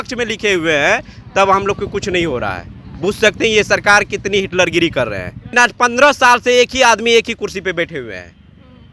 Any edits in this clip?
yes; 1 cut; at 5.6 s

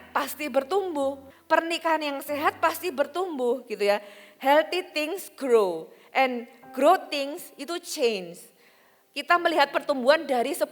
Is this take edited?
yes; 1 cut; at 1.3 s

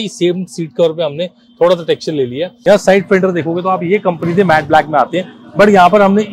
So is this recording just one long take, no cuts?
no; 1 cut; at 2.5 s

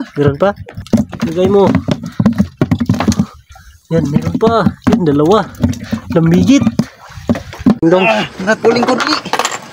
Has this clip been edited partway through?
yes; 1 cut; at 7.8 s

